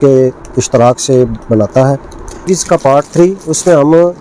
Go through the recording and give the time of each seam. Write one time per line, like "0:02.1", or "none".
0:02.5